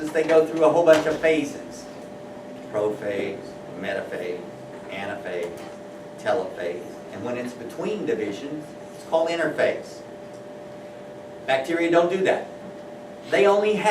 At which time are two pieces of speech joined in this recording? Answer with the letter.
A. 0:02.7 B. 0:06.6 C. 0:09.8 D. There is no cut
B